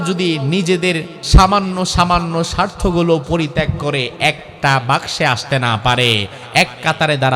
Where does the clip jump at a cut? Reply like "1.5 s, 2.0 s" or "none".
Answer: 1.1 s